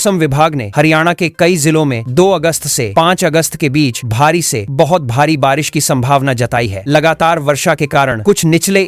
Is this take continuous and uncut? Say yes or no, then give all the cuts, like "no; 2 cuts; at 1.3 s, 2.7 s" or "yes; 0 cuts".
yes; 0 cuts